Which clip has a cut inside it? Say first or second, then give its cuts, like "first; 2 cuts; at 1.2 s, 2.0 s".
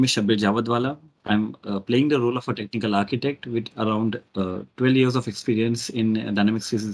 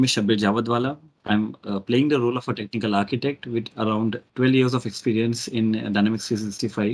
second; 1 cut; at 4.2 s